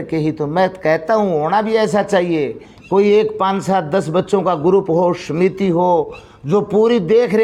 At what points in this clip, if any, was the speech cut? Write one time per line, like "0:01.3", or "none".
none